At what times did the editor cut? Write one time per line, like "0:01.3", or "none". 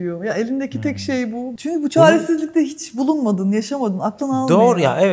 0:01.5